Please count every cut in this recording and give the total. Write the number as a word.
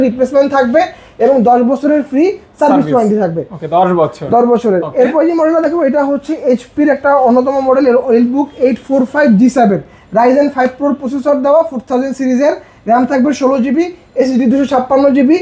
zero